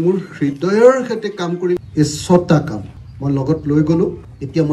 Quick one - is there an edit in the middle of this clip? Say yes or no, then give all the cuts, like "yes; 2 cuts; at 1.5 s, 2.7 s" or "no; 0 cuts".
yes; 1 cut; at 1.9 s